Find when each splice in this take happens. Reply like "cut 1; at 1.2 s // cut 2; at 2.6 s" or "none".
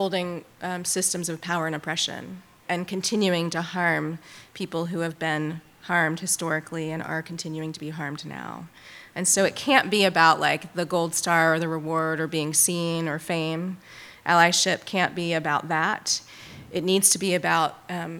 cut 1; at 2.6 s